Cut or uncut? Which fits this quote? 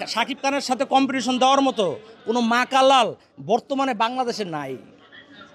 uncut